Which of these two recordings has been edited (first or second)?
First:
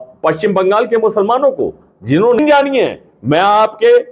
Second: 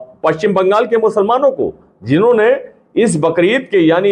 first